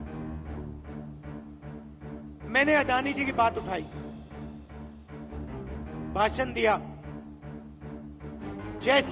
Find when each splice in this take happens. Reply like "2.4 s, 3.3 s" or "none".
0.7 s, 2.1 s, 3.9 s, 5.7 s